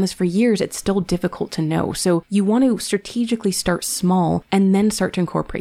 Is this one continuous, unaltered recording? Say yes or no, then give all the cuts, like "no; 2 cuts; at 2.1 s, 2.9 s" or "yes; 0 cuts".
no; 2 cuts; at 2.3 s, 4.4 s